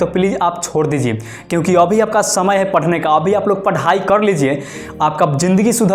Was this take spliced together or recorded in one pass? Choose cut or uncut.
uncut